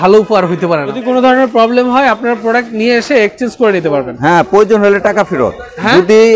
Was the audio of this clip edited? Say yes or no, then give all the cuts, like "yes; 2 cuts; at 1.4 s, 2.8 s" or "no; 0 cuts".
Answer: yes; 1 cut; at 0.9 s